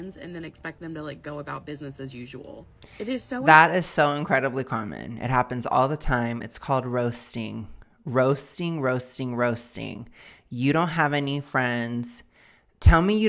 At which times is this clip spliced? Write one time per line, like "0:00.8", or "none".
none

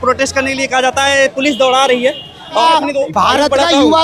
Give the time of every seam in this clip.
0:02.6

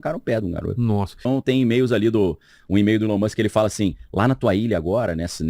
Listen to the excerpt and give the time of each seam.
0:01.2

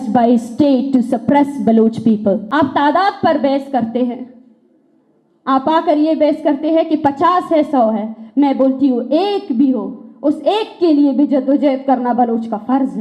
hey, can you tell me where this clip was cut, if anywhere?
0:02.4

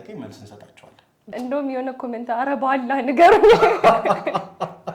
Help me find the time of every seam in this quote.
0:01.2

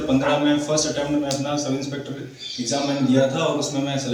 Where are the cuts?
none

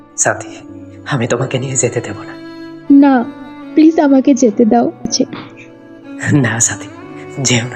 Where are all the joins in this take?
0:05.1

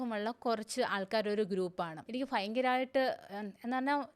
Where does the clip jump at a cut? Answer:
0:02.0

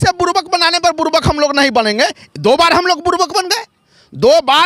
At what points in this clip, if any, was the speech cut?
none

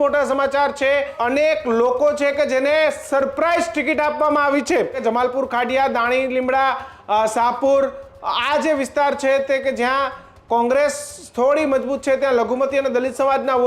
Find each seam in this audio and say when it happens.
0:01.2
0:05.0

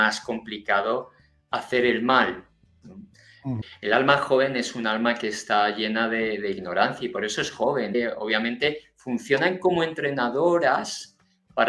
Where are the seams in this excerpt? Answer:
0:03.7
0:07.9

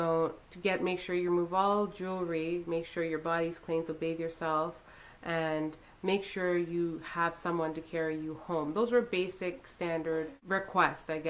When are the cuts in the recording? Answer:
0:10.4

